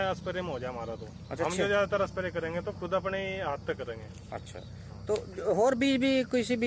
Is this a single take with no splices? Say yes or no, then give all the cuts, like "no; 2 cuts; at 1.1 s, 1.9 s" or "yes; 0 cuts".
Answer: yes; 0 cuts